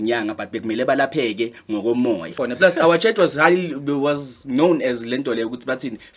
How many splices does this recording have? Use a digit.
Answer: 1